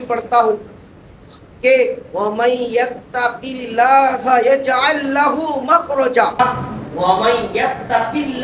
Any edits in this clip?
yes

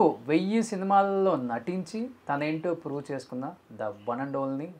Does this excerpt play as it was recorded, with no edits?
yes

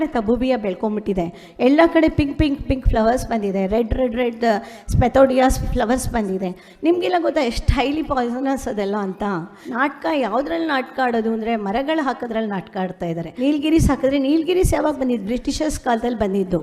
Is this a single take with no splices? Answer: no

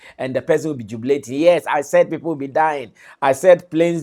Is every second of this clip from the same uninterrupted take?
yes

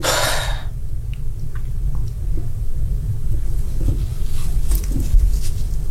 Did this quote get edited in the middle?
no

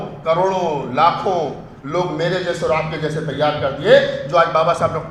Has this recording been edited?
no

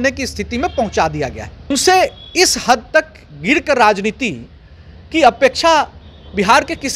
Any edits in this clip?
yes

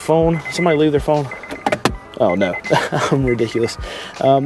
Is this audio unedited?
yes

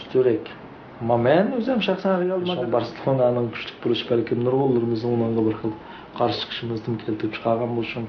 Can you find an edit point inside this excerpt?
yes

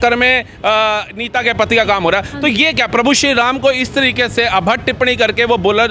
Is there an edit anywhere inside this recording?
no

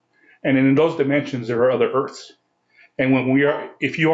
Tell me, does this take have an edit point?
no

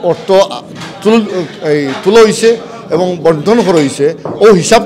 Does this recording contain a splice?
no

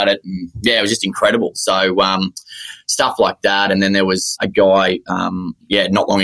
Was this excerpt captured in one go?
yes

